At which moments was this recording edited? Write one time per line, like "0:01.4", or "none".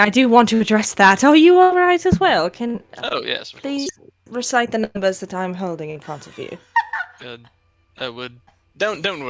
none

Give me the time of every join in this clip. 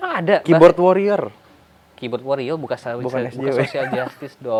none

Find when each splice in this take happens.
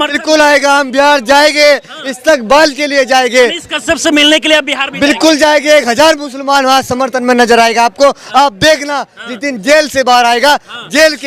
none

